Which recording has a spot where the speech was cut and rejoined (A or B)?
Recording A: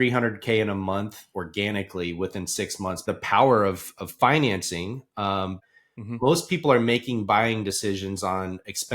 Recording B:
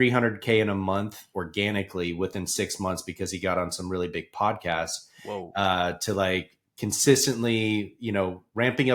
A